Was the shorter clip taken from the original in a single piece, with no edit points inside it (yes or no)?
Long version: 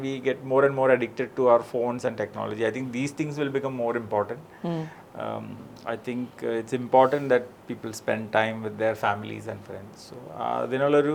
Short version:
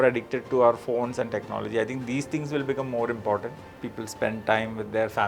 no